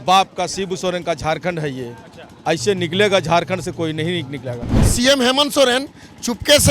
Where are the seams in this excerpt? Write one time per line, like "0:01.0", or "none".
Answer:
0:04.9